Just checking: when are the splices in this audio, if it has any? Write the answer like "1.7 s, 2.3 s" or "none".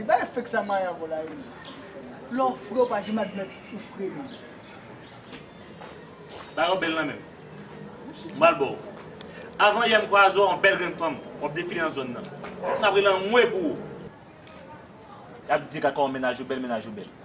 11.4 s